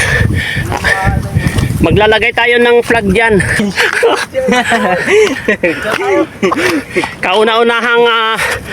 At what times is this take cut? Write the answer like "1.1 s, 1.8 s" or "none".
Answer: 3.6 s